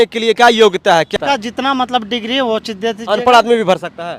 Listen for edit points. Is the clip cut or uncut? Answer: cut